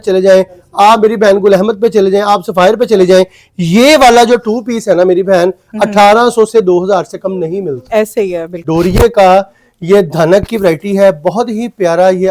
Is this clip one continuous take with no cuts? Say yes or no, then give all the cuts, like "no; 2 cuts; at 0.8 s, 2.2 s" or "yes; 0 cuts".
no; 1 cut; at 8.6 s